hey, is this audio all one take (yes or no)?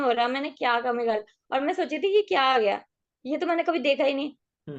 yes